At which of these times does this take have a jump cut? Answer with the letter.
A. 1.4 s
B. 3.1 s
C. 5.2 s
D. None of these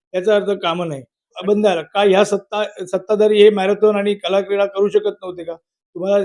A